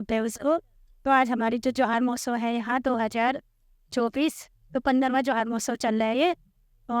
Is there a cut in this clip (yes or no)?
no